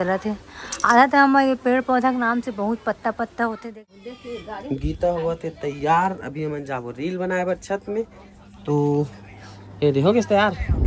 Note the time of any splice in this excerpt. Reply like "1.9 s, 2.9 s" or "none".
4.0 s